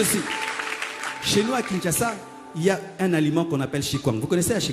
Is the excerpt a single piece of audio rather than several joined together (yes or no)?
yes